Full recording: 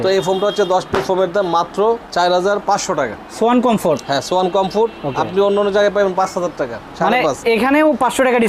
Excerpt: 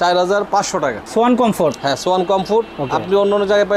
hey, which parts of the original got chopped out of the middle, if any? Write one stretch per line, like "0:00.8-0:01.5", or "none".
0:03.2-0:03.3